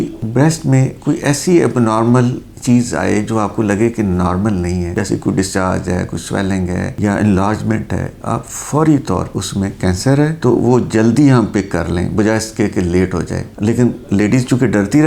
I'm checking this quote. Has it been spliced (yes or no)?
yes